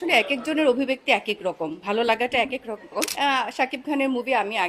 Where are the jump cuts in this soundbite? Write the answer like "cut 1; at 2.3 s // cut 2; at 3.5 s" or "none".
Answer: cut 1; at 3.1 s